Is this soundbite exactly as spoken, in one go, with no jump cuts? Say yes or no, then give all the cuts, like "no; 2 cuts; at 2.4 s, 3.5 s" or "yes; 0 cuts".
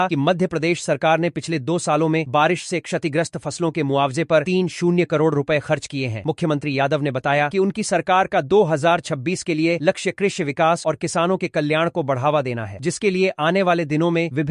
yes; 0 cuts